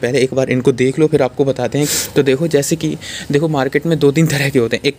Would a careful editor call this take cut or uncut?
cut